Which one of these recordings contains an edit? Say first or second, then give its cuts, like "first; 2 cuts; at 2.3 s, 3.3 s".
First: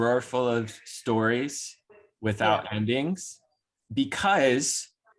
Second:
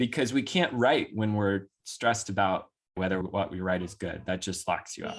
second; 1 cut; at 3.2 s